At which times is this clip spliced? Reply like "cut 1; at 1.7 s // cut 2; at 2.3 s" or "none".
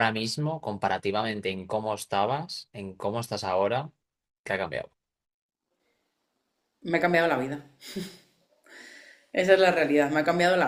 none